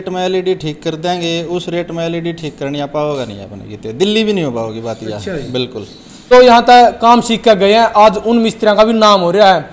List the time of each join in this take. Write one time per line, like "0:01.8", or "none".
0:06.2